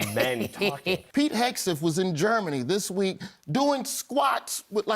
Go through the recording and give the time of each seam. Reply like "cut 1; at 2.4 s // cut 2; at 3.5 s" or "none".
cut 1; at 1.0 s